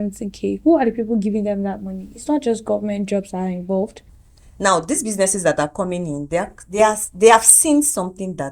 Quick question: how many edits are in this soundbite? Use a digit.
1